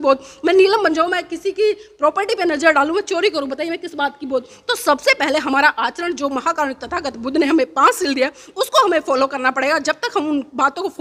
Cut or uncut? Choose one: uncut